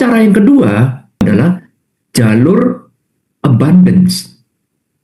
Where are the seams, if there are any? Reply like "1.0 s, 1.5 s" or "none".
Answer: 1.2 s